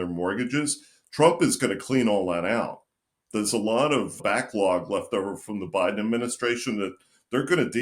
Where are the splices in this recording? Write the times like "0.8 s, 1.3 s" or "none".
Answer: 4.2 s

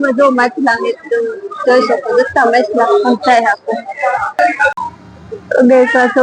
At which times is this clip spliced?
4.8 s

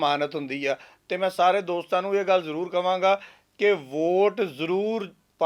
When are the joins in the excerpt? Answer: none

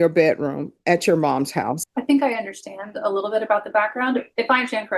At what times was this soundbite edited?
1.8 s

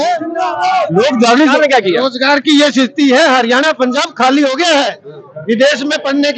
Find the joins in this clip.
1.5 s

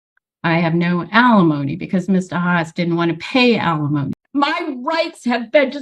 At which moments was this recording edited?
4.2 s

